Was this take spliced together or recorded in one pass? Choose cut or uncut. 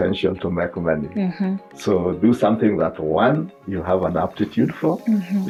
uncut